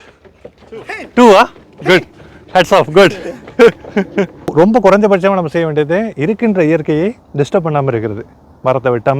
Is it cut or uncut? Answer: cut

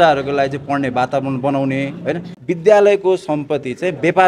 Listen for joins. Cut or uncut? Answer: cut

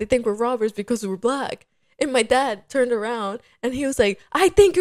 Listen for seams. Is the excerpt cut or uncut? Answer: uncut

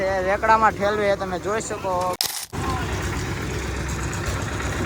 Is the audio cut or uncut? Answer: cut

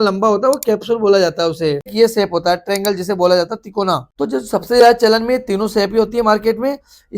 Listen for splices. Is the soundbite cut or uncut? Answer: cut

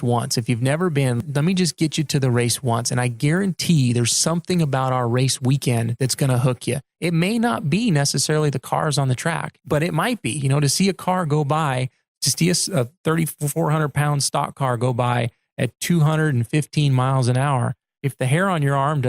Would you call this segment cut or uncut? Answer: cut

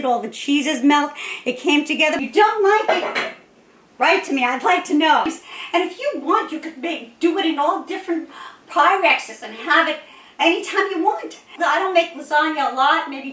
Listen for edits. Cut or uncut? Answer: cut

